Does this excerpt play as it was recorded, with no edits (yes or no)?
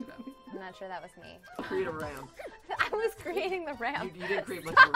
no